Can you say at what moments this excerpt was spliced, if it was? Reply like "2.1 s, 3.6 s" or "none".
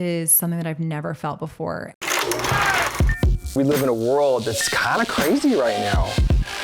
1.9 s